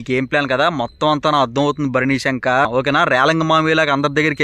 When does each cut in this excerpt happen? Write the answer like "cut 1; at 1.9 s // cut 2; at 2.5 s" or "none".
cut 1; at 2.7 s